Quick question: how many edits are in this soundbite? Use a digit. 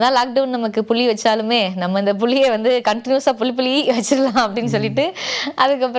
0